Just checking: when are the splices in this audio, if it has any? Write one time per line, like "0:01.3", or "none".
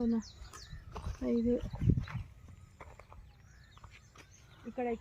none